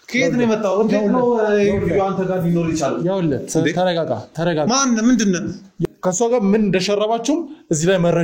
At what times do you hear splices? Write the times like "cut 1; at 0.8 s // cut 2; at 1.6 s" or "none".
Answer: cut 1; at 5.8 s